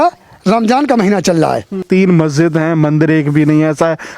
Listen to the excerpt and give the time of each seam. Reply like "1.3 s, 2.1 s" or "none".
1.8 s